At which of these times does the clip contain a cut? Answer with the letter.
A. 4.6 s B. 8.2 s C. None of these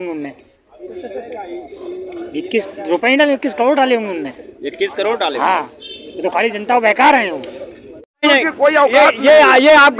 B